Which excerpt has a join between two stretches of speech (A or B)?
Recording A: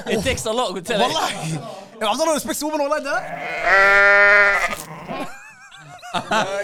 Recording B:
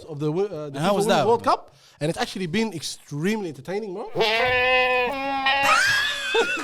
B